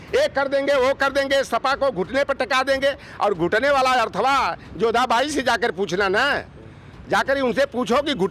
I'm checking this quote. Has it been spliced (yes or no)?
no